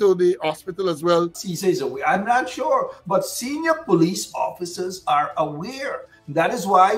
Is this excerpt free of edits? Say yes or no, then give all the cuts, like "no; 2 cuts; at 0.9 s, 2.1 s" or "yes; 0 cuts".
no; 1 cut; at 1.4 s